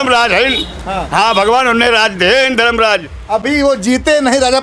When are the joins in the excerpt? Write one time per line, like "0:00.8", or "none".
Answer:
none